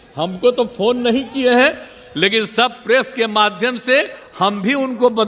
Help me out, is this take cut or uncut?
uncut